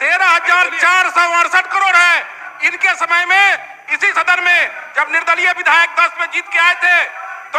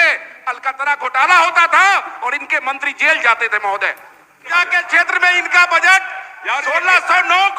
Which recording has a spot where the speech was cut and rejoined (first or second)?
second